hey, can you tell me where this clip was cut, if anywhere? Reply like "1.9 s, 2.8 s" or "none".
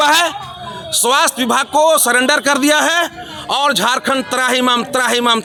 none